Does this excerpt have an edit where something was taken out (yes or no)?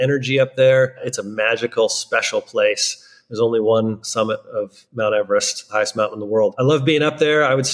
yes